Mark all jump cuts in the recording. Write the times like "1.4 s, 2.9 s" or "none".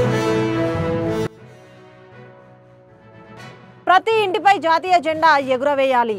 1.0 s